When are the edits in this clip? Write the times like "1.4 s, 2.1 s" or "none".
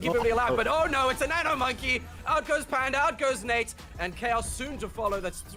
none